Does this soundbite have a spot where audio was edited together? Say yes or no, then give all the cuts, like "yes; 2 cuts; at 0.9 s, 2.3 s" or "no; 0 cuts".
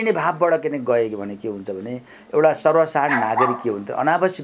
no; 0 cuts